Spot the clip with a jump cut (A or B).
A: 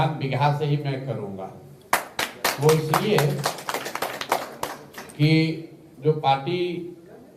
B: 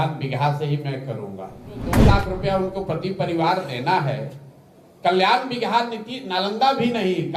B